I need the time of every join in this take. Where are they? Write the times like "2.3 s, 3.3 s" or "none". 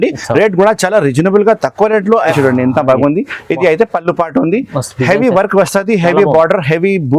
2.3 s